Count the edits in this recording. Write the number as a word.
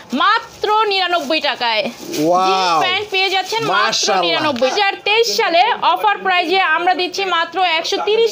one